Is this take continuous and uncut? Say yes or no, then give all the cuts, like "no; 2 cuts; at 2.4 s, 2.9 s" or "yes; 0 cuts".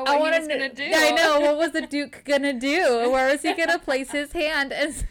yes; 0 cuts